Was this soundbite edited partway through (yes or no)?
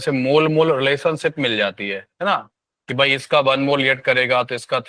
no